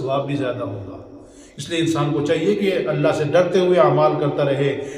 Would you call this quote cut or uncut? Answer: uncut